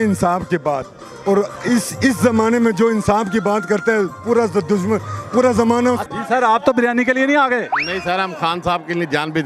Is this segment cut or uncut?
cut